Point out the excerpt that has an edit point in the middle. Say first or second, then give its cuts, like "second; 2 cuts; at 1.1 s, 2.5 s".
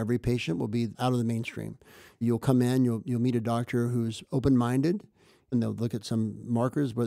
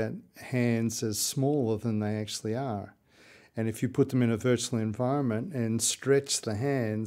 first; 3 cuts; at 1.0 s, 2.2 s, 5.5 s